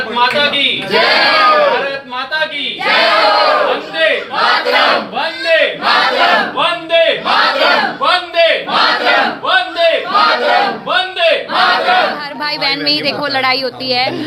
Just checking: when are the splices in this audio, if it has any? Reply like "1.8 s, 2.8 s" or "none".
12.4 s